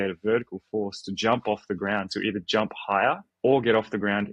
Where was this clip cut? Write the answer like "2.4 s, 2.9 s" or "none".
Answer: 3.3 s